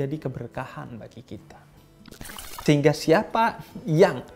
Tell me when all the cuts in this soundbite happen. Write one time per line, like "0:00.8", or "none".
0:02.5